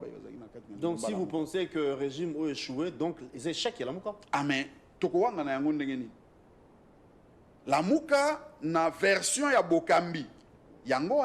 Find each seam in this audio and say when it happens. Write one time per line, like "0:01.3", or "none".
none